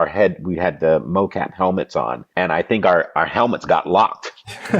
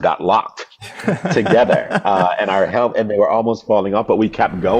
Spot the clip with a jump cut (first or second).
first